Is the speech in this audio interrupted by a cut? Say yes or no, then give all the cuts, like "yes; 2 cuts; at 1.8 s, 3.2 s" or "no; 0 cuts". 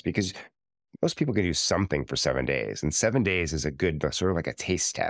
no; 0 cuts